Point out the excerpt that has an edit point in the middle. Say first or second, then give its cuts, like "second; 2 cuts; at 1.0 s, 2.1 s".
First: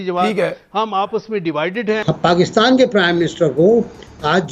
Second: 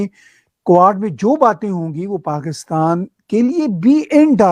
first; 1 cut; at 2.1 s